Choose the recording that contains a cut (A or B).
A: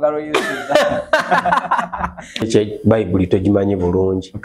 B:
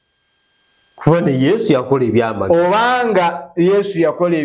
A